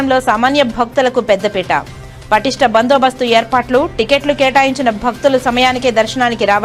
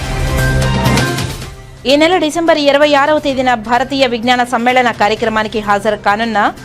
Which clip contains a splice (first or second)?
second